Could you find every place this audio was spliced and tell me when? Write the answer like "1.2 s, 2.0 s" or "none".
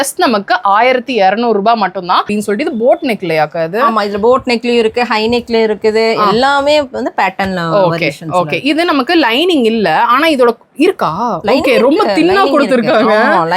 2.3 s